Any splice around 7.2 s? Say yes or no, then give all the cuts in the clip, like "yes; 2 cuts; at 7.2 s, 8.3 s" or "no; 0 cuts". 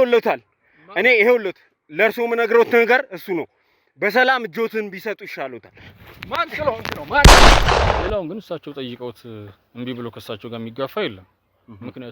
yes; 2 cuts; at 7.2 s, 8.1 s